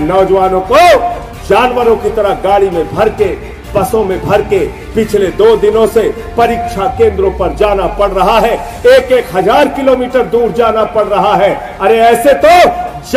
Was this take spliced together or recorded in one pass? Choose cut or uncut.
uncut